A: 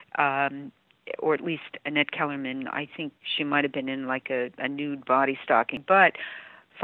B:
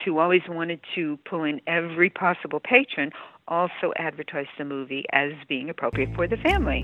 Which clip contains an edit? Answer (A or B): A